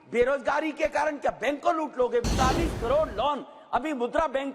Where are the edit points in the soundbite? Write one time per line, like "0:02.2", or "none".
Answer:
0:02.2